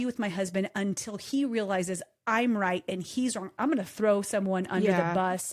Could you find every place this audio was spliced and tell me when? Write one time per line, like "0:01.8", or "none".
0:03.6